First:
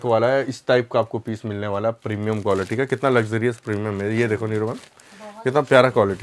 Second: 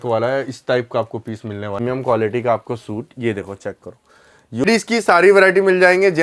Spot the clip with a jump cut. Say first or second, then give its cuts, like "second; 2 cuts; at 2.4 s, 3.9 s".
second; 2 cuts; at 1.8 s, 4.6 s